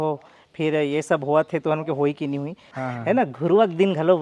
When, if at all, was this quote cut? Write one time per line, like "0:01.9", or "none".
0:02.8